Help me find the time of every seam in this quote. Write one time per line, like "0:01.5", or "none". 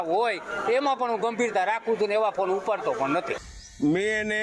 0:03.4